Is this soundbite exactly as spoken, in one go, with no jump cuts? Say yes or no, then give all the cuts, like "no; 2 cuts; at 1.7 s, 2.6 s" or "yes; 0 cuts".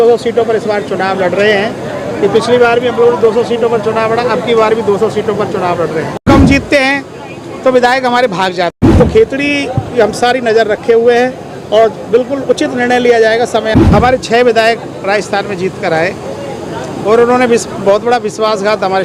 no; 3 cuts; at 6.2 s, 8.8 s, 13.8 s